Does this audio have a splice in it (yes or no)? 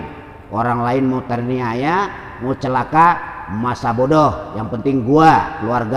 no